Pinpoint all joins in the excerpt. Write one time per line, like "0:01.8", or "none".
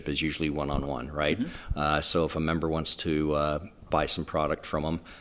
none